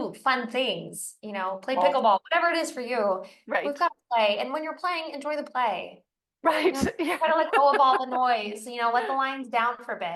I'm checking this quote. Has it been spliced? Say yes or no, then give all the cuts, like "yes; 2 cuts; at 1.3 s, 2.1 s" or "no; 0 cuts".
no; 0 cuts